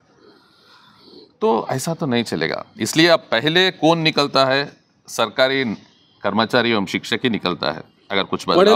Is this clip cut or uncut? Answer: uncut